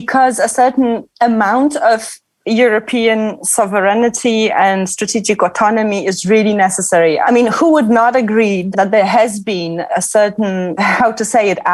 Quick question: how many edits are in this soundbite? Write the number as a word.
zero